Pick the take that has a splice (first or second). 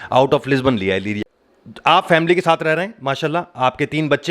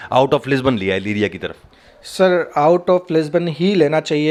first